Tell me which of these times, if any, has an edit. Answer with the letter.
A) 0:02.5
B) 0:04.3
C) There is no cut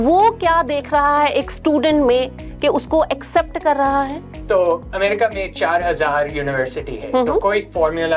C